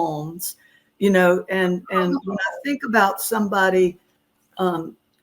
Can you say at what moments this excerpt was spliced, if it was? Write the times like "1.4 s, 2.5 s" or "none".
none

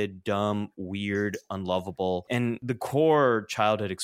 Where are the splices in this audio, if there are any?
2.5 s

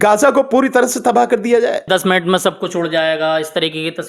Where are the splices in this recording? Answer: 1.8 s

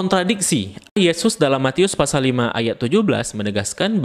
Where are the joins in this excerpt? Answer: 1.0 s

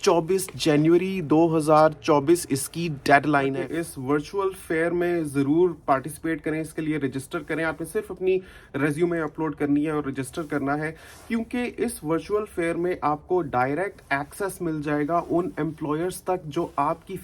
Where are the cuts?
3.6 s

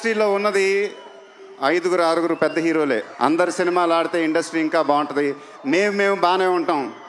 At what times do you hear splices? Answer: none

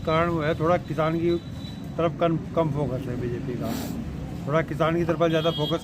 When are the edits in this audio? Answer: none

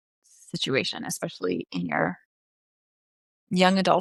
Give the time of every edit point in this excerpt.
none

